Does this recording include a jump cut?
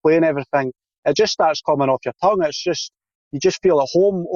no; 0 cuts

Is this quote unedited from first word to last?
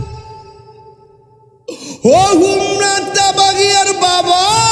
yes; 0 cuts

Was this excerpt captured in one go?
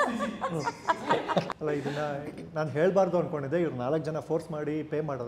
no; 1 cut; at 1.5 s

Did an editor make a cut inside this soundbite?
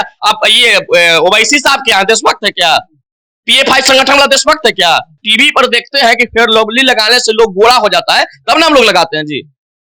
yes; 1 cut; at 5.2 s

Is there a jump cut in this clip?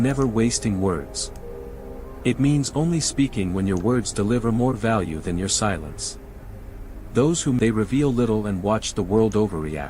yes; 1 cut; at 7.6 s

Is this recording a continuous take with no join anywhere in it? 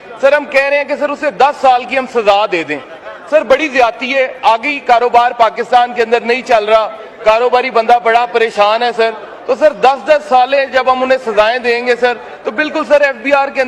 yes; 0 cuts

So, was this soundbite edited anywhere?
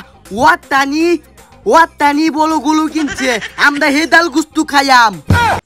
no; 0 cuts

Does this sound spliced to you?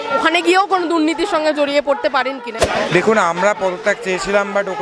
yes; 1 cut; at 2.5 s

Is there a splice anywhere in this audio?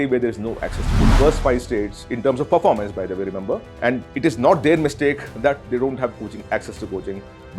yes; 1 cut; at 1.1 s

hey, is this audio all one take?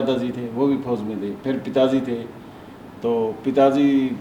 yes; 0 cuts

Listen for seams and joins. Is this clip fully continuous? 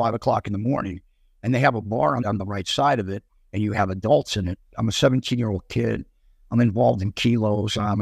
no; 2 cuts; at 2.2 s, 4.7 s

